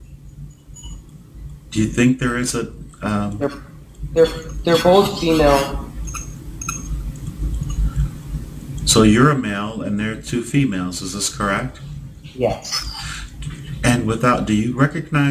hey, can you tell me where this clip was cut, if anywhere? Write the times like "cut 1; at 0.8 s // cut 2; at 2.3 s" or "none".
cut 1; at 10.4 s